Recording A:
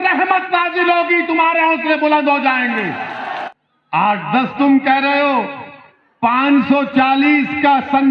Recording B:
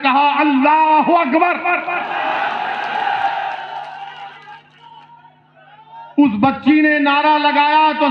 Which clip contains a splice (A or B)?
A